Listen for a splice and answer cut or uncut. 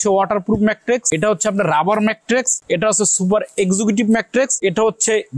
cut